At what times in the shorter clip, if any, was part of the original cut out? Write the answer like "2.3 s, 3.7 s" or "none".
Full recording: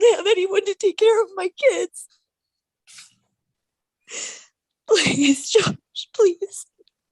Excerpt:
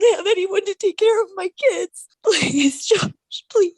2.0 s